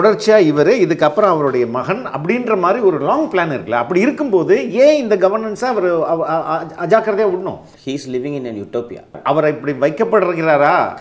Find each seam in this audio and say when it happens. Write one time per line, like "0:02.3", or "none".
0:07.7
0:09.2